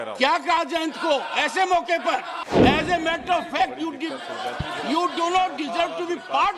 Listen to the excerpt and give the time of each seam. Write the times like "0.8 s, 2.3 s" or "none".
2.6 s